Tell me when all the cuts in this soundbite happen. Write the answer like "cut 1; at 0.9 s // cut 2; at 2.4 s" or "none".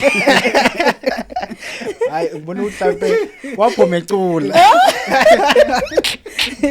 none